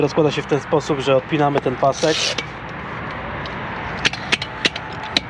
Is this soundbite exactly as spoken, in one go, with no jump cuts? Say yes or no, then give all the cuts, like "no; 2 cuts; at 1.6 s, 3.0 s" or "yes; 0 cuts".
yes; 0 cuts